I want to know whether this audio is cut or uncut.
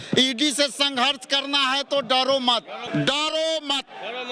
cut